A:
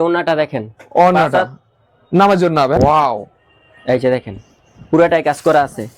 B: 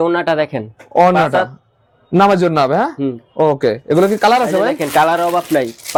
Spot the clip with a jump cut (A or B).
A